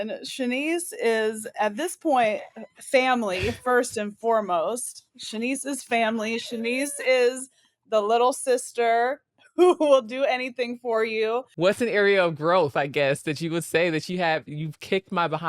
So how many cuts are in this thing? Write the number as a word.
one